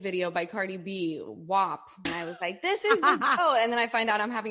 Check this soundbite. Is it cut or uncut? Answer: cut